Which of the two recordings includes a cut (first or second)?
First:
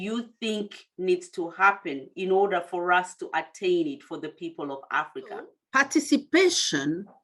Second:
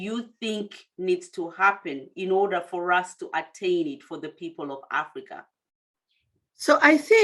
first